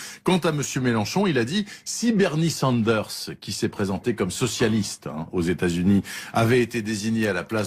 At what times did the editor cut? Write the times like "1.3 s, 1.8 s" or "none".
none